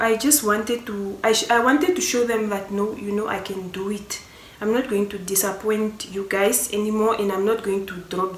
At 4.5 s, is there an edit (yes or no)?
no